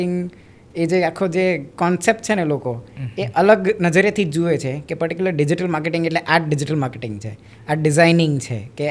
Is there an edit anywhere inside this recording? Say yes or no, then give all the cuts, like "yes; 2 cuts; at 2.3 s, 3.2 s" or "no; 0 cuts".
no; 0 cuts